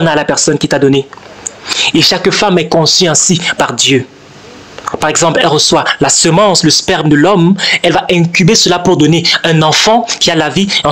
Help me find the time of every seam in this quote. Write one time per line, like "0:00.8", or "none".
none